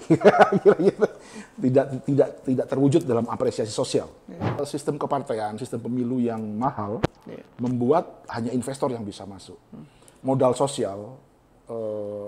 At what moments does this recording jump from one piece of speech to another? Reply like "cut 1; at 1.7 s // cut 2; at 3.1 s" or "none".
cut 1; at 4.6 s